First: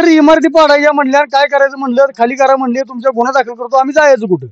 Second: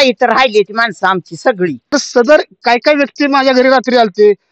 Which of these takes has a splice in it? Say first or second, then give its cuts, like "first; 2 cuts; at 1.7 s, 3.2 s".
second; 1 cut; at 1.9 s